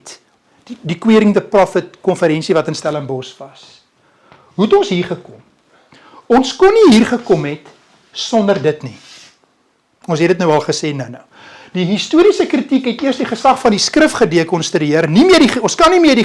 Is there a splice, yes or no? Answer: no